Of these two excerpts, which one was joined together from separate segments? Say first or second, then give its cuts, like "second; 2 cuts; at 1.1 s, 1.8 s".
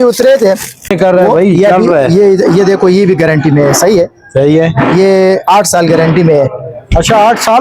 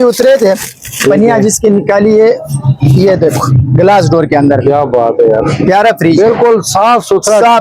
first; 1 cut; at 0.9 s